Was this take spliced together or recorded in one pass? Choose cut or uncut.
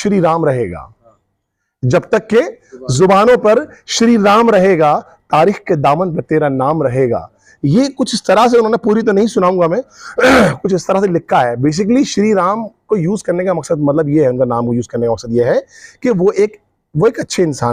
uncut